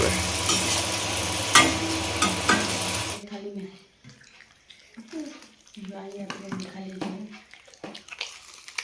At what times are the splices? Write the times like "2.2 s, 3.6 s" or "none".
3.2 s